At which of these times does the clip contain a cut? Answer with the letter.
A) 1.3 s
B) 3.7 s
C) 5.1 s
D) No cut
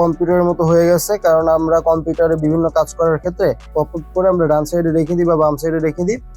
B